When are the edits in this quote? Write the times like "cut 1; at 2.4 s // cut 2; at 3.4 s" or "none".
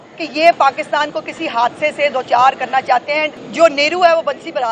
cut 1; at 3.4 s